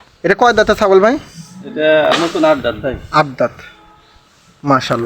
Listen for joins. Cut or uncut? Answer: uncut